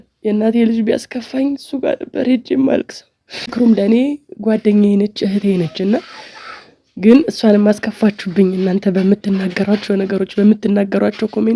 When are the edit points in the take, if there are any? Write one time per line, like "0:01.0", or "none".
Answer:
0:03.5